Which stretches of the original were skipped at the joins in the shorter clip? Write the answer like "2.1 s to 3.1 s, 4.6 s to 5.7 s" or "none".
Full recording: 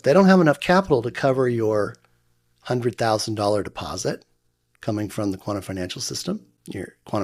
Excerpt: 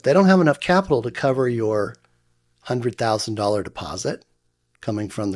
none

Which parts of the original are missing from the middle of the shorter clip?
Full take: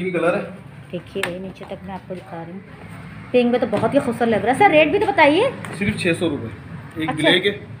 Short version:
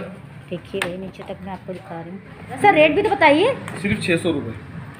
3.0 s to 4.6 s

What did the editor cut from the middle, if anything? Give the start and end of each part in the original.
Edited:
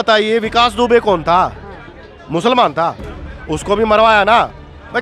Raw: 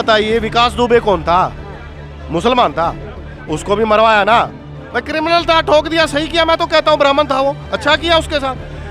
none

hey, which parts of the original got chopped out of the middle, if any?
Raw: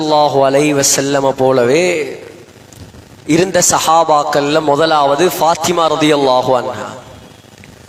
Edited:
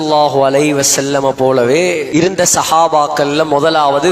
2.1 s to 3.2 s

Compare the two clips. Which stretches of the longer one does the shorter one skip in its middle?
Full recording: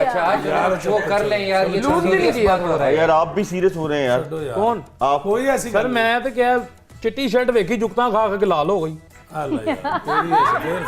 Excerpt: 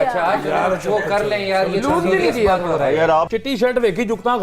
3.3 s to 7.0 s

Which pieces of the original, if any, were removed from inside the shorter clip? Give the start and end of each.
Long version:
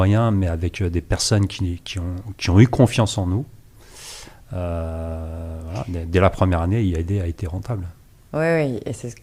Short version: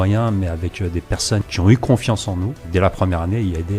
1.5 s to 2.4 s, 3.5 s to 6.0 s

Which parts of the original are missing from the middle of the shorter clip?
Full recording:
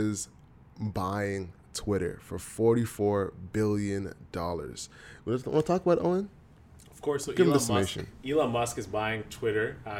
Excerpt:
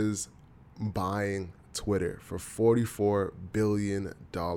none

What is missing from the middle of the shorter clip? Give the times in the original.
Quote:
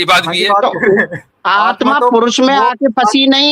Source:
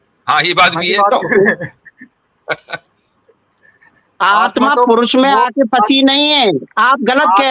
1.7 s to 4.0 s

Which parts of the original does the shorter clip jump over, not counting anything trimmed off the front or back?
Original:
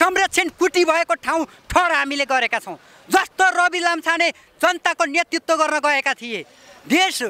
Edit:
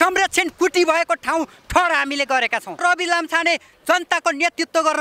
2.8 s to 3.5 s

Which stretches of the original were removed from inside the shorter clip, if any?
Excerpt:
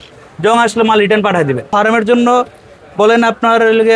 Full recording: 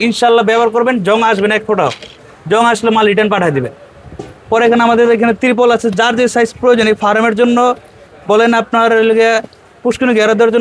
3.8 s to 7.0 s

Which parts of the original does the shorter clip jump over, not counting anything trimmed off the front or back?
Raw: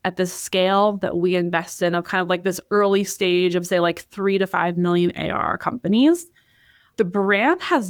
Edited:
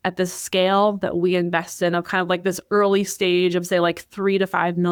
none

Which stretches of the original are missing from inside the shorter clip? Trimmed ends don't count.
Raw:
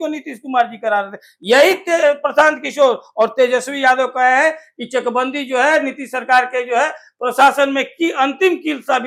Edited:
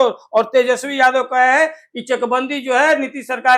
none

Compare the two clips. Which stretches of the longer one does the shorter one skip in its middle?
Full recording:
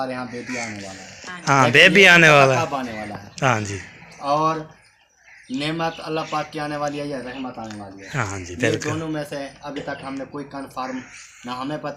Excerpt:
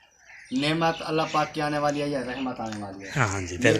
none

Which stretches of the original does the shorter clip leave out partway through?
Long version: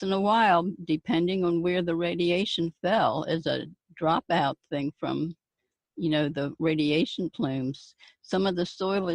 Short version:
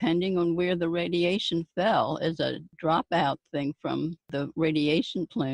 3.7 s to 3.8 s, 5.5 s to 6.3 s

